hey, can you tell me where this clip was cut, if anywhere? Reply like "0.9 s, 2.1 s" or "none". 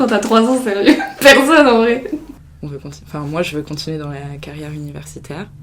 2.4 s